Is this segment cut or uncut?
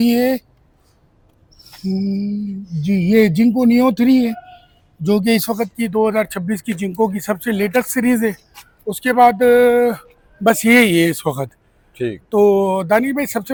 uncut